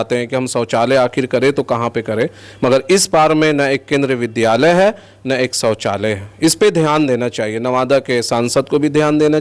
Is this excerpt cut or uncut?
uncut